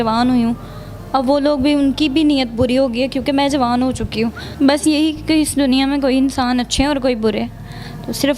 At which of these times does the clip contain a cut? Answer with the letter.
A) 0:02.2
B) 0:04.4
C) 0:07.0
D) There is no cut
B